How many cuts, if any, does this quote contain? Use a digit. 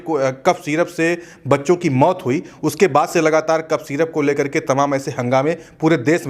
0